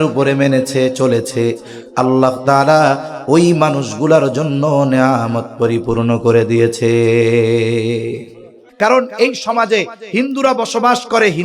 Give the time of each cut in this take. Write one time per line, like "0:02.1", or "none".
0:08.6